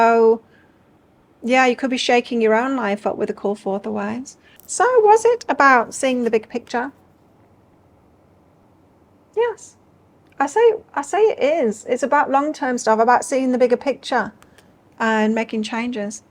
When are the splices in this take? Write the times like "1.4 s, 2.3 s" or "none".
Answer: 4.5 s

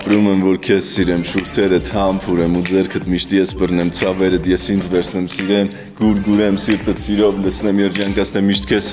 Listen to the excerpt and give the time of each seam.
none

